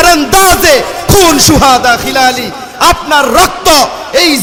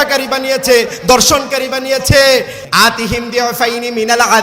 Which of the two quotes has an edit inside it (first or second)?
second